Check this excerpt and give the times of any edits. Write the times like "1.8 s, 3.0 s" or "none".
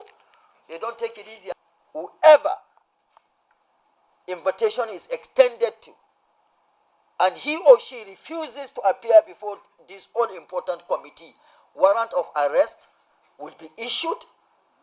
1.5 s